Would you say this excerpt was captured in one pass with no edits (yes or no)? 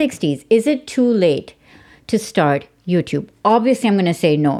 yes